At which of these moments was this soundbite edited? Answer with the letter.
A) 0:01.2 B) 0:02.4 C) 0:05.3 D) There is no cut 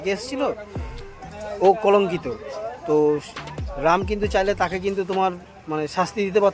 D